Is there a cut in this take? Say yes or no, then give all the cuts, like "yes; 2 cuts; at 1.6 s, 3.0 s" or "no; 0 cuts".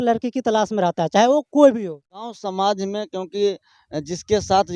yes; 1 cut; at 2.3 s